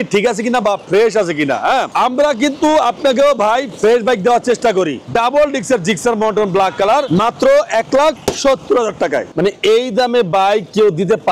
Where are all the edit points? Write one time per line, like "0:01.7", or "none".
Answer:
0:05.1
0:09.3